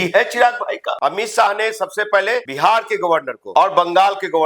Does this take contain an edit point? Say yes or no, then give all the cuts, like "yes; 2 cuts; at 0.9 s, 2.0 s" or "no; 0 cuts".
yes; 3 cuts; at 0.9 s, 2.5 s, 3.4 s